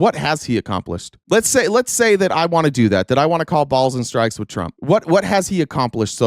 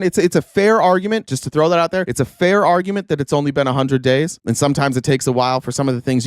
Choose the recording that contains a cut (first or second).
second